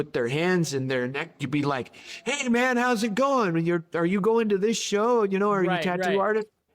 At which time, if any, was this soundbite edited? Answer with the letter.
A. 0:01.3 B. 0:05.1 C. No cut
A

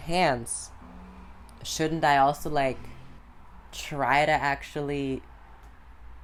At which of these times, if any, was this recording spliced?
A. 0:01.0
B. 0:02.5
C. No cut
C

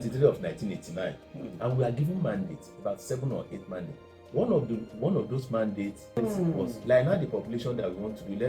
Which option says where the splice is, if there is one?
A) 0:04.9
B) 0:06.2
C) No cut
B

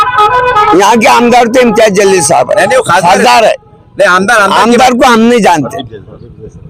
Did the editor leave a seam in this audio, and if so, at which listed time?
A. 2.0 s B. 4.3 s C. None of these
C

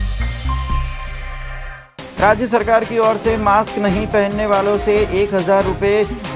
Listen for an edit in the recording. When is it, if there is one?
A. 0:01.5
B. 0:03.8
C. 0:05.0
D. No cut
A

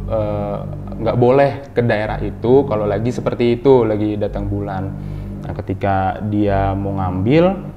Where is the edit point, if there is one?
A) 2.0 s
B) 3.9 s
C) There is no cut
C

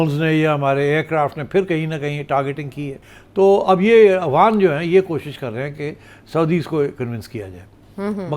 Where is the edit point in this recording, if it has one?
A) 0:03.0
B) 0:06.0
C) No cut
A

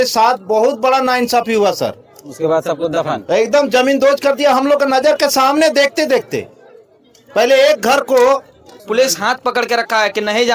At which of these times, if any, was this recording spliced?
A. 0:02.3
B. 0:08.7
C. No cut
B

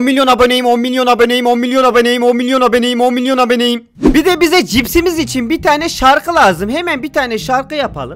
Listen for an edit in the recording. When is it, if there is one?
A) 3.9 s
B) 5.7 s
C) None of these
A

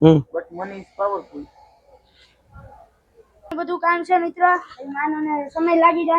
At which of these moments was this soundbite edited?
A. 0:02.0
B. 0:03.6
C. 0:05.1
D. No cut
B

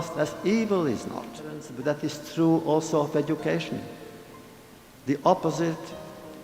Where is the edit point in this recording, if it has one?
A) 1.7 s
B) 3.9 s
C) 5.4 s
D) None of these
A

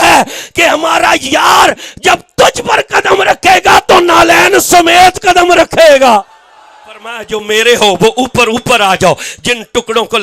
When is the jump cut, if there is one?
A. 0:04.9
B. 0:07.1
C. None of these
B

